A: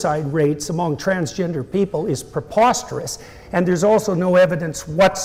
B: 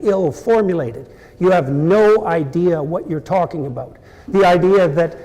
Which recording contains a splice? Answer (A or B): B